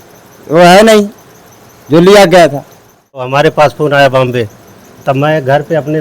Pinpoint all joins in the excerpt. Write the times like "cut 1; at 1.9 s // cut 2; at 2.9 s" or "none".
cut 1; at 3.3 s